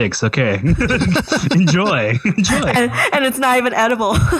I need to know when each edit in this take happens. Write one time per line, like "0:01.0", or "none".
none